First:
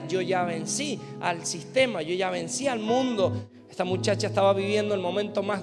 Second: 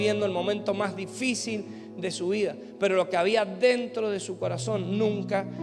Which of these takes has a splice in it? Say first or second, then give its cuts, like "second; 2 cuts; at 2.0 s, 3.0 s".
first; 1 cut; at 3.4 s